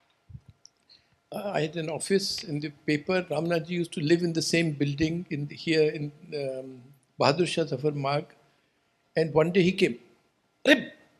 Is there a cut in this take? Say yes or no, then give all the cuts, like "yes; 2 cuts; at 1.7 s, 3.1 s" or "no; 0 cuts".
no; 0 cuts